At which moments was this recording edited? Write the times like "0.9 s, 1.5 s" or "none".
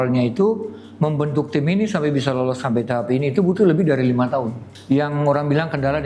2.6 s, 4.7 s